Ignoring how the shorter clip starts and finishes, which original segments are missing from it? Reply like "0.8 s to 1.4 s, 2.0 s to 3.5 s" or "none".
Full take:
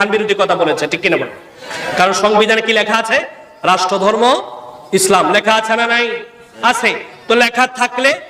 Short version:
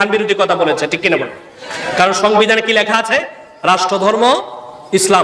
none